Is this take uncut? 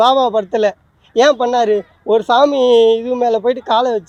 yes; 0 cuts

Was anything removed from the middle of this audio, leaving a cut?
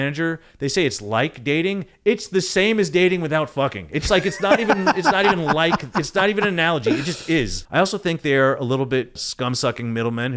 yes; 2 cuts; at 7.6 s, 9.2 s

